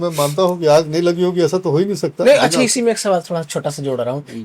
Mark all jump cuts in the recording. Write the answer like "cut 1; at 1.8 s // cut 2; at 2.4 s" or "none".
none